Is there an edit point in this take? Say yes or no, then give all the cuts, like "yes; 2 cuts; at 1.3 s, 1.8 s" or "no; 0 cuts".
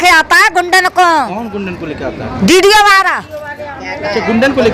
no; 0 cuts